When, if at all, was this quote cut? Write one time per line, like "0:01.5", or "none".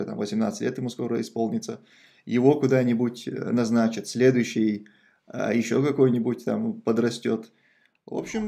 none